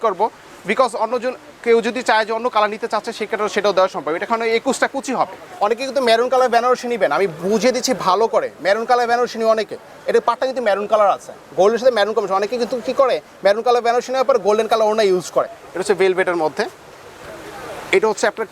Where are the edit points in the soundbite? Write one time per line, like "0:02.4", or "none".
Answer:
0:05.4
0:15.6